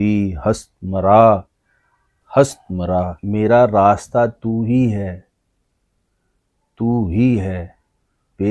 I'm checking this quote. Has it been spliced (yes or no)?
yes